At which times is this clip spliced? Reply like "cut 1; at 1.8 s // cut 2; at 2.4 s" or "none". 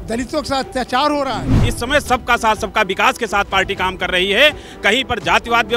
cut 1; at 1.6 s